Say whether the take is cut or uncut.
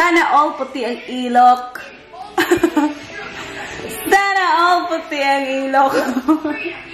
uncut